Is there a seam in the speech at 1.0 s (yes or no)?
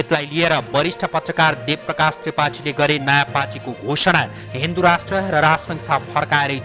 no